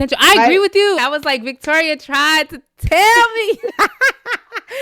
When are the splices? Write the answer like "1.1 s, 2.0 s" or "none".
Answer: 1.0 s